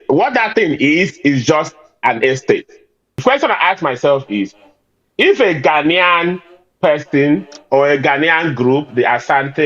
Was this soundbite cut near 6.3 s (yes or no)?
no